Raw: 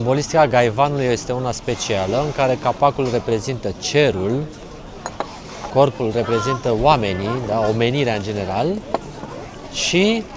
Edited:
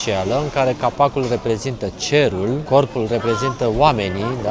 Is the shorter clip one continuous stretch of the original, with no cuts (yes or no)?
no